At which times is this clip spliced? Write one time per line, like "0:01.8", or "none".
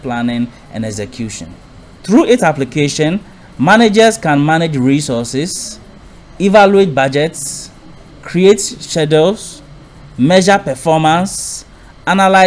0:02.0